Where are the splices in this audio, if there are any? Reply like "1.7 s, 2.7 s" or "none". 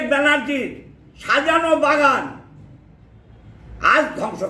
none